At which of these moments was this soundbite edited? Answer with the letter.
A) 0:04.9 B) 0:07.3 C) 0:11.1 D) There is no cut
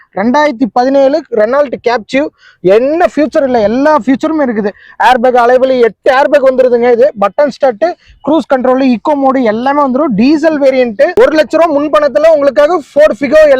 C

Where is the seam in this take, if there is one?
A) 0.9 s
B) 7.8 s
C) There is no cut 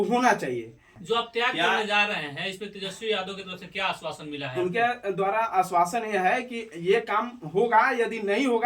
A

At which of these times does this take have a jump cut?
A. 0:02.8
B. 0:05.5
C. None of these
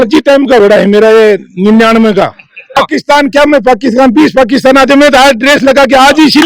A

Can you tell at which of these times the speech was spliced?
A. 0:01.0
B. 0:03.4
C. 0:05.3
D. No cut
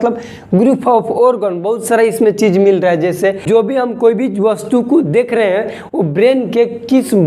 B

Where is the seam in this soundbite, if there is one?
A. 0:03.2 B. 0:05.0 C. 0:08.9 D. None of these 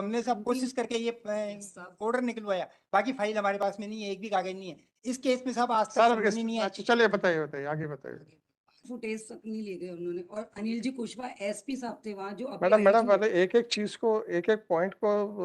C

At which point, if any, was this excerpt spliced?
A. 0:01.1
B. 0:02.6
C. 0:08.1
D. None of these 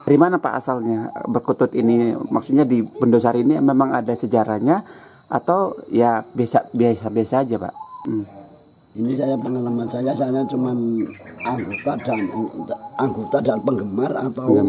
C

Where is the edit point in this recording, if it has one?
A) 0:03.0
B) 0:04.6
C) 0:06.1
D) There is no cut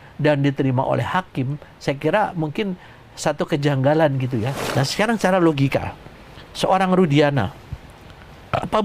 B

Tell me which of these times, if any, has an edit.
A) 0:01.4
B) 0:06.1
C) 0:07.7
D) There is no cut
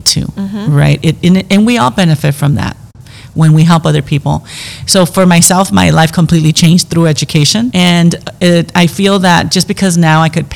C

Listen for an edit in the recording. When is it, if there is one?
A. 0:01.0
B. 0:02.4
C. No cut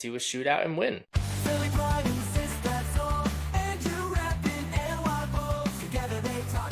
A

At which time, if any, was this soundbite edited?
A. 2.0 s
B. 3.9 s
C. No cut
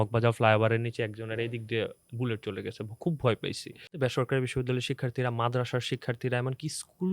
B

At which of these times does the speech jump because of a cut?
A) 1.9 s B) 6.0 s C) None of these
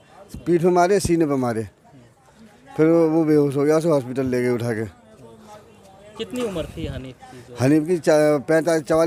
C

